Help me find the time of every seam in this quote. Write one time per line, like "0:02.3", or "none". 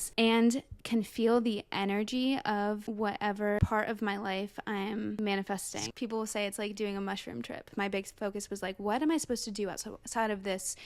0:05.8
0:07.7